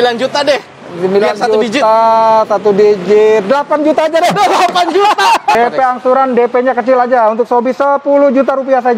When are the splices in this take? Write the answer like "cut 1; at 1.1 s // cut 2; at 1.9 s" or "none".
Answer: cut 1; at 5.5 s